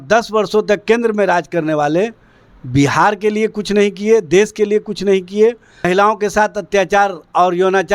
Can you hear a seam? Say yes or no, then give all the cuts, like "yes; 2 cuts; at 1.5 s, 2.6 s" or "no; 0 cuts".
yes; 1 cut; at 5.9 s